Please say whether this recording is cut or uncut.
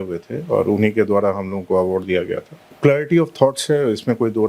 uncut